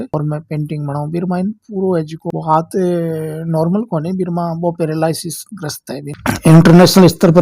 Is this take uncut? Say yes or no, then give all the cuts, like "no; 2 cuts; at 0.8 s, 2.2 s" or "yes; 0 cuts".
no; 1 cut; at 6.3 s